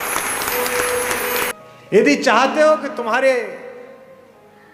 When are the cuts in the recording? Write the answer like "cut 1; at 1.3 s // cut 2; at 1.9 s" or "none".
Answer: cut 1; at 1.5 s